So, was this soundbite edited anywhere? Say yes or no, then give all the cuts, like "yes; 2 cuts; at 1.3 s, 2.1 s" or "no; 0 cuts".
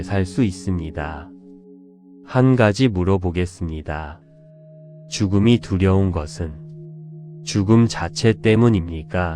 yes; 2 cuts; at 4.1 s, 7.5 s